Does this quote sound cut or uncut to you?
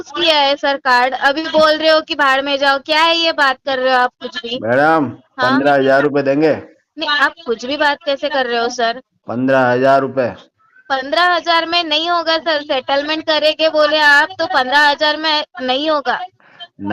uncut